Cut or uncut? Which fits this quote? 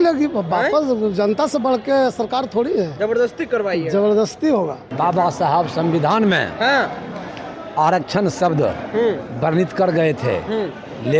cut